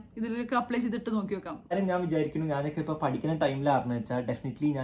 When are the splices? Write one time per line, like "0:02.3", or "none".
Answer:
0:01.7